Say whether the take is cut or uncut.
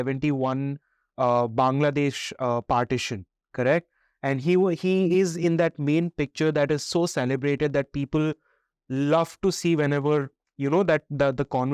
uncut